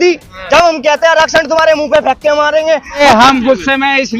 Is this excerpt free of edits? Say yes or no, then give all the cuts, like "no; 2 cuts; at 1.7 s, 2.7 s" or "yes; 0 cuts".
no; 1 cut; at 3.0 s